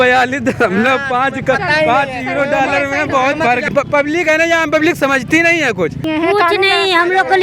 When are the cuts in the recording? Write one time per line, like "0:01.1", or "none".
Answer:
0:03.7
0:06.0